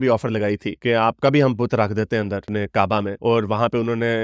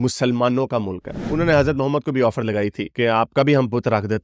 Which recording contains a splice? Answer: second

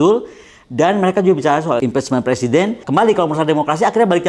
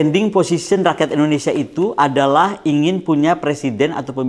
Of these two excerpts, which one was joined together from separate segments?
first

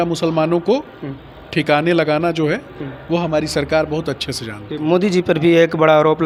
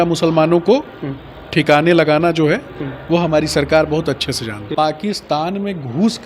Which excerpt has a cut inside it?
second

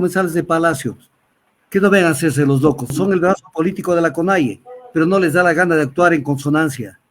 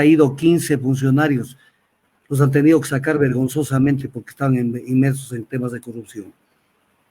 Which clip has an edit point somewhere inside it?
first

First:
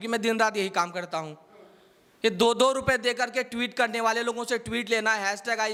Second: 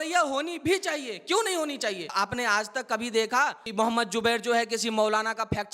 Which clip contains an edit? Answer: second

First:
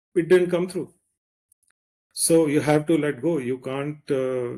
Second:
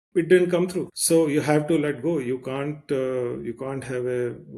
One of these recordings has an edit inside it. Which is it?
second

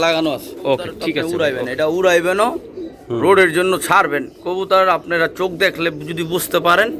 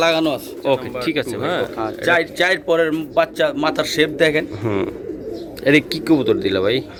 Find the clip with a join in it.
first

